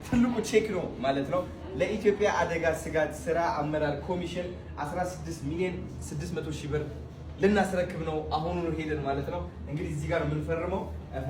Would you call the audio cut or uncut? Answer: uncut